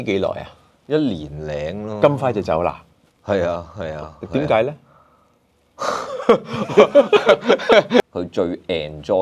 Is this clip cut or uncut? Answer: cut